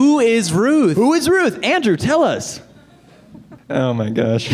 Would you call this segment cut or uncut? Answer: uncut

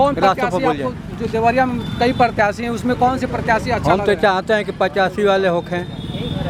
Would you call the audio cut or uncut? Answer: uncut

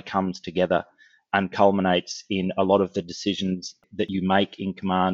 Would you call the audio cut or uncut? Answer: cut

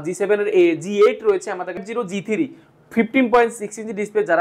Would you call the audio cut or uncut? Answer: cut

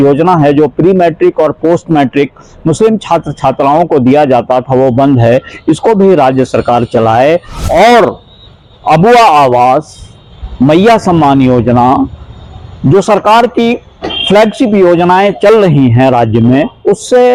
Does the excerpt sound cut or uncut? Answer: uncut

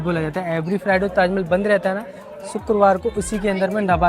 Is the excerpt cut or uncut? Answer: uncut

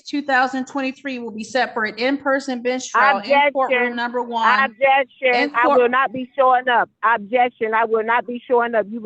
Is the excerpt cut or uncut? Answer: uncut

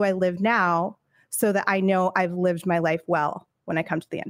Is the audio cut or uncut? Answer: uncut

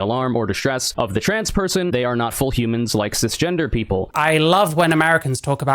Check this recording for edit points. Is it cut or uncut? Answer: cut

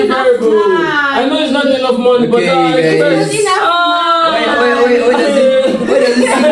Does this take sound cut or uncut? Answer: uncut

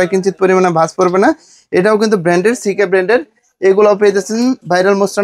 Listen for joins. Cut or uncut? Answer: uncut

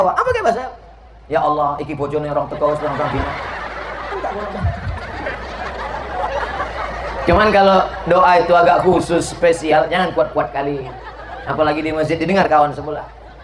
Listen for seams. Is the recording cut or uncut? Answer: uncut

